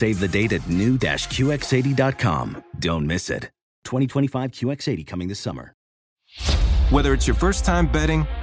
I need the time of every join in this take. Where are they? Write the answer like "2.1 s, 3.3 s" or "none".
5.9 s